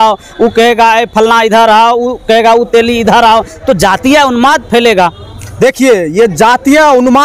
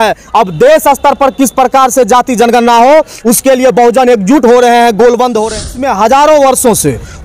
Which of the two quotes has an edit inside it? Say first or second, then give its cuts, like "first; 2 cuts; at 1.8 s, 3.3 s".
second; 1 cut; at 5.7 s